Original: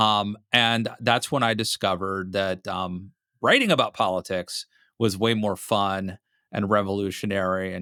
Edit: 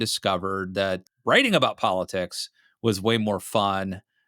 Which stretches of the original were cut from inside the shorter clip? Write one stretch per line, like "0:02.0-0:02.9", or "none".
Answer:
0:02.7-0:03.2